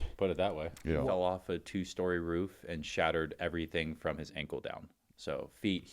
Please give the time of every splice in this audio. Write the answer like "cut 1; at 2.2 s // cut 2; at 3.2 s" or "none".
cut 1; at 1.0 s